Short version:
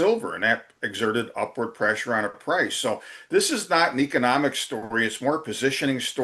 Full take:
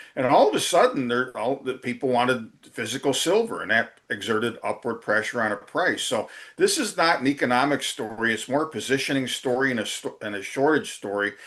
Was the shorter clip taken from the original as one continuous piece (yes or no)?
yes